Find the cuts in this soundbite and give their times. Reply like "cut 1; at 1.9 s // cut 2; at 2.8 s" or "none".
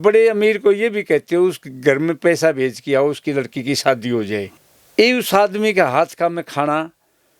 cut 1; at 4.5 s